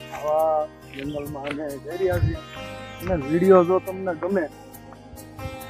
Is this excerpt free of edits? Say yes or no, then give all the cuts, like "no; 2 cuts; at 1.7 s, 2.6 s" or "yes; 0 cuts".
yes; 0 cuts